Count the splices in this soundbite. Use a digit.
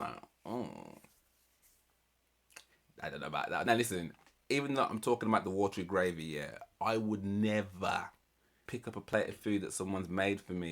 2